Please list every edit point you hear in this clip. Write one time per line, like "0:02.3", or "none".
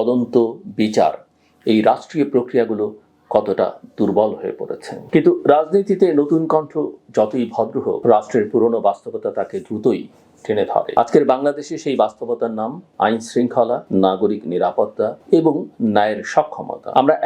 0:04.9